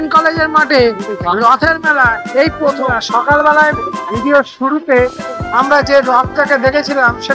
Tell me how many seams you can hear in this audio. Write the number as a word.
one